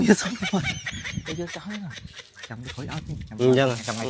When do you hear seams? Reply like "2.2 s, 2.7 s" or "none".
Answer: none